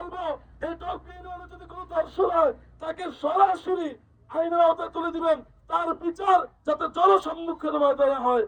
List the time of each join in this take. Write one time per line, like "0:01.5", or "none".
none